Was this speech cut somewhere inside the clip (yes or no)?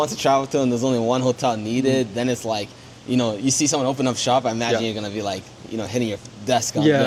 no